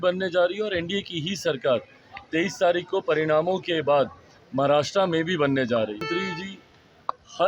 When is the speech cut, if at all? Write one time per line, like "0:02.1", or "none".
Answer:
0:06.1